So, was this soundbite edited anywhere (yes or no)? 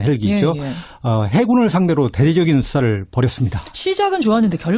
no